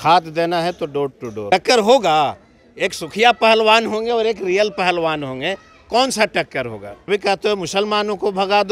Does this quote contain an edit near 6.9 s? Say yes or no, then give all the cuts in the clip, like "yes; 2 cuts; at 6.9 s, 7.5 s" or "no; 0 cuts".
yes; 2 cuts; at 1.5 s, 6.9 s